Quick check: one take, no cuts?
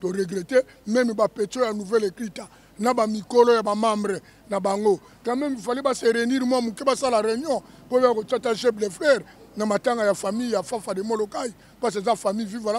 yes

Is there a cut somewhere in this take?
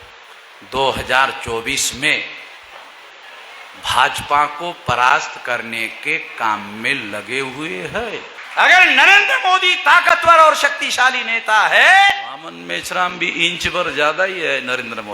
yes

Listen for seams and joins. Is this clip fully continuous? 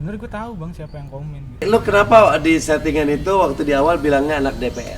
no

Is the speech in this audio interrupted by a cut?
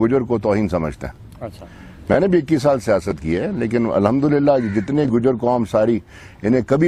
no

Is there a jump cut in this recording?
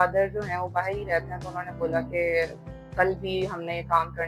no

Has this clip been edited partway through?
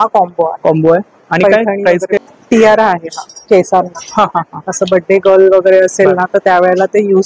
yes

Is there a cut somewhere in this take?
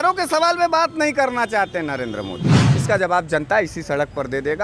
yes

